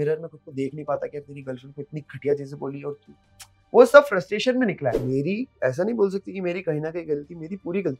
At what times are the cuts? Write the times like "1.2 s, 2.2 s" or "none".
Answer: 4.9 s